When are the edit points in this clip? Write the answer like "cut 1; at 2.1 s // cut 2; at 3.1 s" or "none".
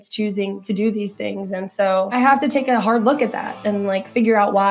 cut 1; at 2.1 s